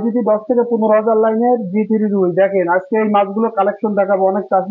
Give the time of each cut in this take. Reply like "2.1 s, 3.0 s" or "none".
none